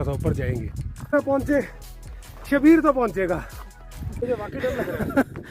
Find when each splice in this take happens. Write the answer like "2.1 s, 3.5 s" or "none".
1.1 s, 4.2 s